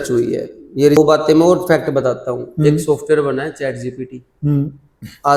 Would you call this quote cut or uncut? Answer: cut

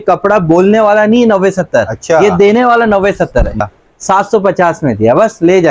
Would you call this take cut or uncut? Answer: cut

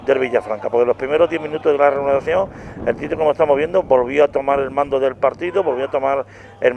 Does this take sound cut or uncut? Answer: cut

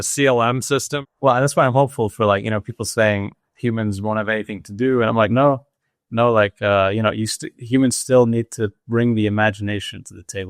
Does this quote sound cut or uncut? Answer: cut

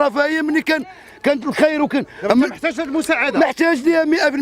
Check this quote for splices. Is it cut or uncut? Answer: cut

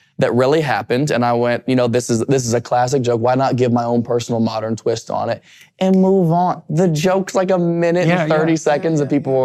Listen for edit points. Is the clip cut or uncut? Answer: uncut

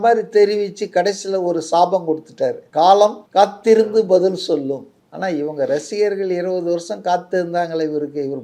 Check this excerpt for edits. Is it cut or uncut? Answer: cut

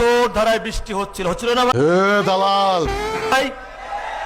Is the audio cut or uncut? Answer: uncut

